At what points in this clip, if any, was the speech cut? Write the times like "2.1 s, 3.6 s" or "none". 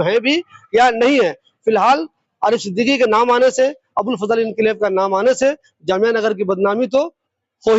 none